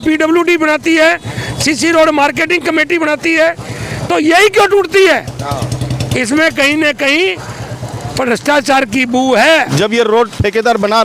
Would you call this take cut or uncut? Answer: cut